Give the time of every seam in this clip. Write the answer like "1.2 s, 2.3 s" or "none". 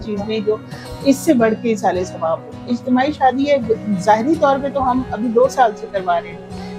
2.7 s